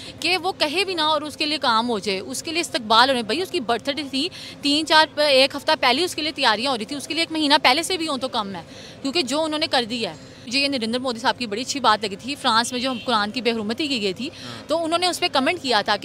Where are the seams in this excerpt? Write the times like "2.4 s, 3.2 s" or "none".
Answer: 10.5 s